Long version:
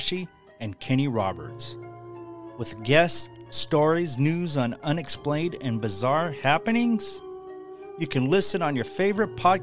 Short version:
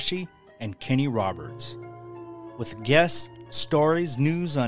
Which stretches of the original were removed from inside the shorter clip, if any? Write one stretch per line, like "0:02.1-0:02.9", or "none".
none